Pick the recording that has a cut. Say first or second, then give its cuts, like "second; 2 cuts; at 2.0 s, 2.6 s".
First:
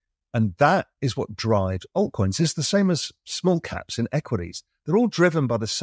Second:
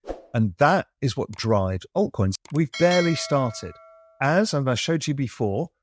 second; 1 cut; at 2.3 s